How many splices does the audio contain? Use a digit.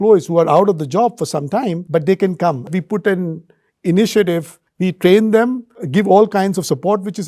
3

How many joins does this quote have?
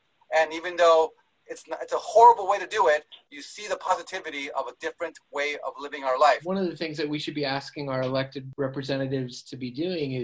2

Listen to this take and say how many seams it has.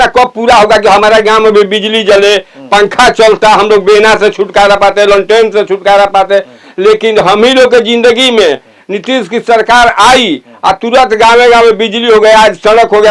0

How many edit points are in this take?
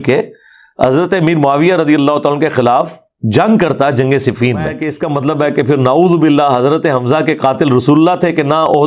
1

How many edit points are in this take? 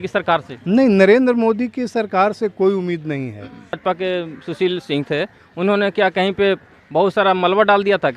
1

